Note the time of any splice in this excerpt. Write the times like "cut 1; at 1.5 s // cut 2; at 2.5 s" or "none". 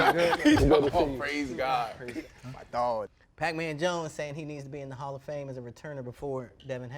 cut 1; at 2.3 s // cut 2; at 3.2 s